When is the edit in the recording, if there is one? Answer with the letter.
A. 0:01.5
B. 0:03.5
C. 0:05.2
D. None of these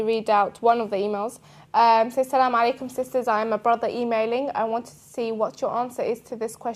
B